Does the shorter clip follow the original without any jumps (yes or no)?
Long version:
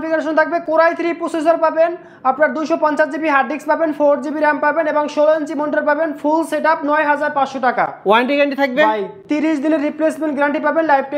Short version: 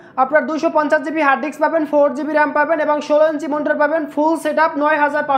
yes